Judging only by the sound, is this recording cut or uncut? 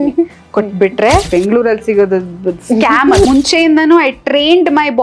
cut